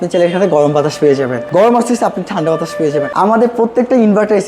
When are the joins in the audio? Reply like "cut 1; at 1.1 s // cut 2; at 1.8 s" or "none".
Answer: cut 1; at 1.4 s // cut 2; at 3.1 s